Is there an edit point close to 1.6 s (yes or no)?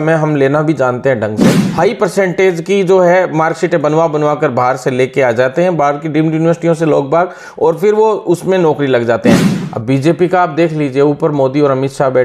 yes